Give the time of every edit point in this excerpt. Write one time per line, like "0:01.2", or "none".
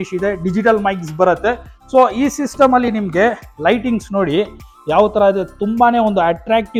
none